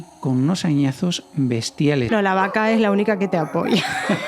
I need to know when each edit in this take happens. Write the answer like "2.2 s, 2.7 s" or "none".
2.1 s